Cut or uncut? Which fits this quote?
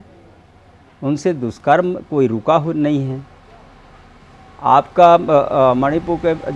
uncut